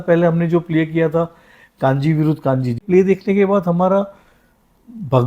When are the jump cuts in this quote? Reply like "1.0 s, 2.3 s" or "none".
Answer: 2.8 s

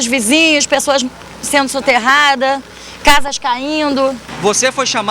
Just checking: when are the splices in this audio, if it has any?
4.2 s

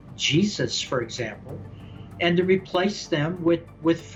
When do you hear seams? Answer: none

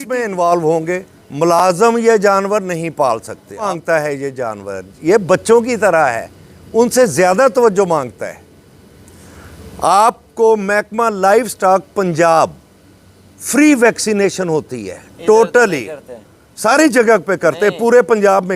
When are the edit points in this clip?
3.7 s

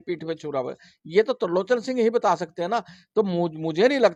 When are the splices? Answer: none

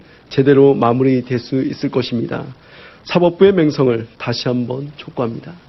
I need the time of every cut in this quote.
3.3 s

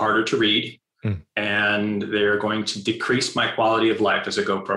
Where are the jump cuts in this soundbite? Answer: none

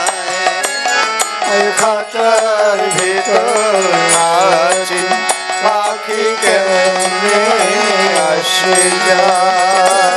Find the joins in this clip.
none

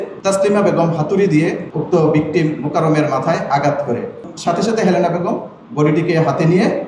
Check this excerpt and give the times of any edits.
4.3 s

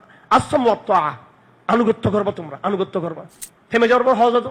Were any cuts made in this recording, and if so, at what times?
3.3 s

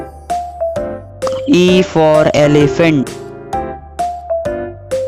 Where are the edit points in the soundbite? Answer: 1.4 s, 3.1 s

